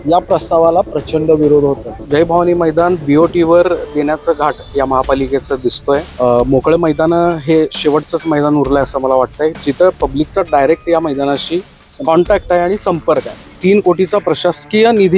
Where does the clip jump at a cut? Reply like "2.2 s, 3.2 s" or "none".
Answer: 1.9 s, 6.1 s, 13.5 s